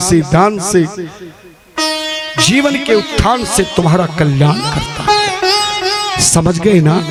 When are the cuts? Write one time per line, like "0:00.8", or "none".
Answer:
none